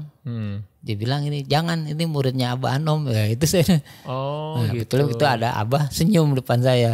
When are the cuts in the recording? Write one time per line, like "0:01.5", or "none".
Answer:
none

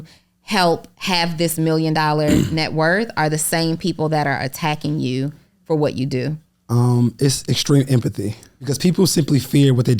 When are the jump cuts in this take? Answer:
0:08.7

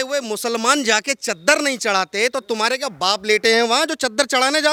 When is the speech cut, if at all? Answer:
none

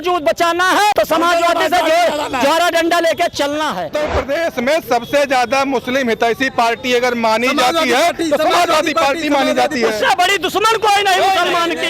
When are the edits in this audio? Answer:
0:00.9
0:03.9

